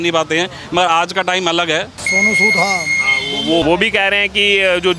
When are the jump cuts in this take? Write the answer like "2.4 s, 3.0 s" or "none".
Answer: 2.0 s, 3.6 s